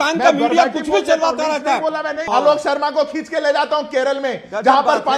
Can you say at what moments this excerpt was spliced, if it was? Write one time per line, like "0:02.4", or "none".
0:02.2